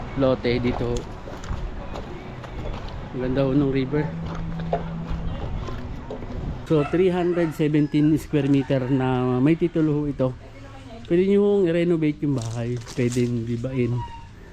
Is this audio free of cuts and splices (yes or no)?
no